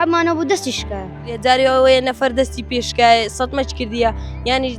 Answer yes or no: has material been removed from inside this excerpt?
yes